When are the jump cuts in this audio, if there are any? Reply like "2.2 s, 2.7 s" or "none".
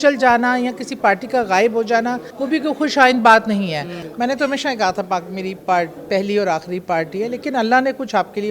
2.3 s, 4.0 s